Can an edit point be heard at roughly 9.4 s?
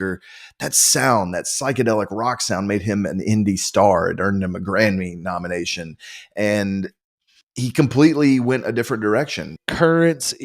yes; 1 cut; at 9.4 s

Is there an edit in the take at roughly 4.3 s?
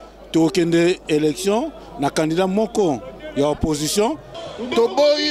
yes; 1 cut; at 4.3 s

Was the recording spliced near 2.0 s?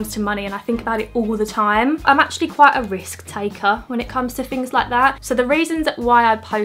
yes; 2 cuts; at 2.0 s, 5.2 s

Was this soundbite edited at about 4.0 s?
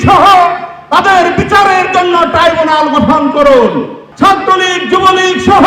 yes; 1 cut; at 4.0 s

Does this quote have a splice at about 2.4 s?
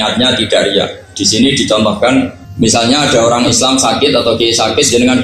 yes; 1 cut; at 2.4 s

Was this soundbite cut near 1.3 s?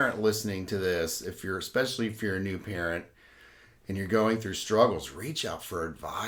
no; 0 cuts

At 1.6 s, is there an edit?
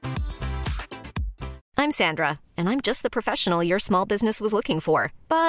yes; 1 cut; at 1.6 s

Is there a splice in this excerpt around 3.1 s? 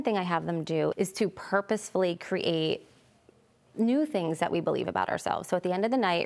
no; 1 cut; at 0.9 s

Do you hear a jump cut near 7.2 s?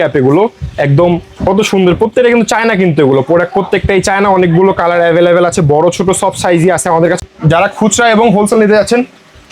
yes; 1 cut; at 7.2 s

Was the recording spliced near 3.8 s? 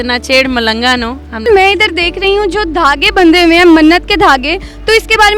no; 1 cut; at 1.5 s

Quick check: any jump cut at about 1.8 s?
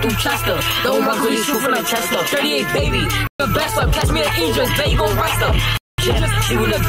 no; 0 cuts

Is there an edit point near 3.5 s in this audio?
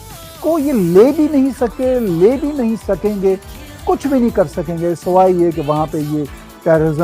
yes; 1 cut; at 3.5 s

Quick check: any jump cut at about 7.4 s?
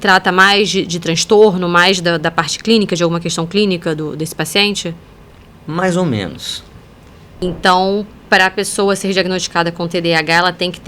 yes; 1 cut; at 7.4 s

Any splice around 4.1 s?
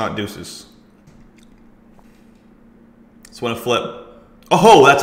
no; 2 cuts; at 1.0 s, 2.0 s

